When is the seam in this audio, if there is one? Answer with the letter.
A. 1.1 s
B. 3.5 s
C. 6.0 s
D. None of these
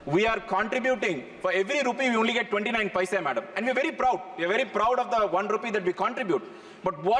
D